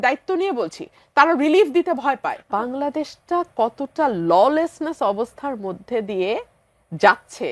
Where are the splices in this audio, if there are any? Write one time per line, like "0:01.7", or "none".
0:02.4